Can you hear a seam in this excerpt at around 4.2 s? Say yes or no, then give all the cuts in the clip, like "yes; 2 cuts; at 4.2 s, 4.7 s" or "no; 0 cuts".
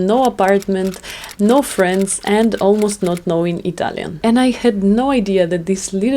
yes; 1 cut; at 4.2 s